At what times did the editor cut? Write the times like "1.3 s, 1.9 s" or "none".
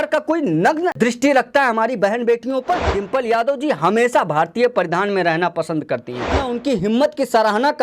0.9 s, 3.0 s, 6.4 s